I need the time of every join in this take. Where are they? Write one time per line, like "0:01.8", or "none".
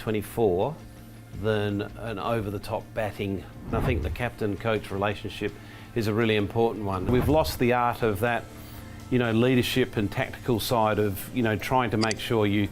0:03.7
0:07.1